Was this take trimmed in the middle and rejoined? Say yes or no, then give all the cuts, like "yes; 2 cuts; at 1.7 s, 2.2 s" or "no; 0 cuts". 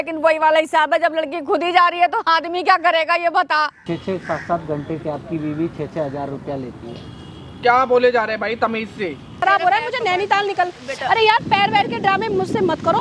yes; 2 cuts; at 3.8 s, 9.4 s